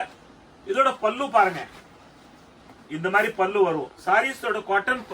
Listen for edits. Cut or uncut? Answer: uncut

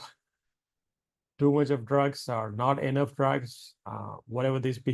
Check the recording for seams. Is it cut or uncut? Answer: uncut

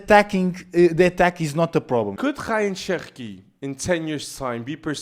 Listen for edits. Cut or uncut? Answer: cut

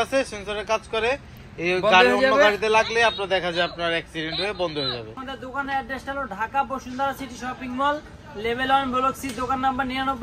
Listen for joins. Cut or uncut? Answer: cut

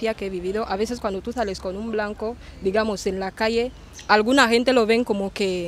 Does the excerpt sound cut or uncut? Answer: uncut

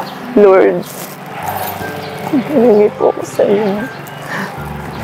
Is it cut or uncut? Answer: uncut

